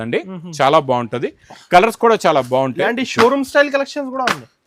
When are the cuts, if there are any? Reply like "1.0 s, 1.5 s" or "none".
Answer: none